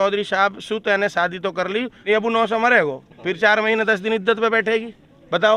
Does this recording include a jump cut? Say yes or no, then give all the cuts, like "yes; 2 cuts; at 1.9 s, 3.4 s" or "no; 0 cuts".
yes; 1 cut; at 1.9 s